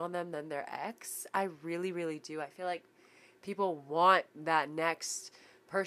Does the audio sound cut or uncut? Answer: uncut